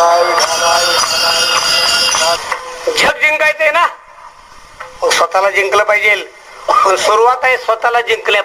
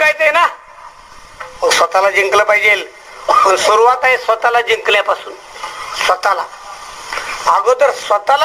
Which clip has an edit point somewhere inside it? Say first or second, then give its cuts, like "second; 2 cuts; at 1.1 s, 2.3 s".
first; 1 cut; at 2.4 s